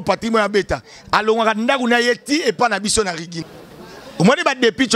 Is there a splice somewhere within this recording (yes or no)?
yes